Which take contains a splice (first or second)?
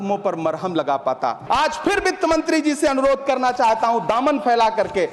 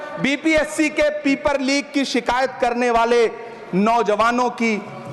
first